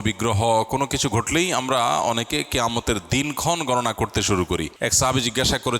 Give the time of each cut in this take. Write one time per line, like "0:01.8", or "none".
0:04.7